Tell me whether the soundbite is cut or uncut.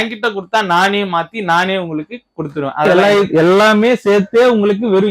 cut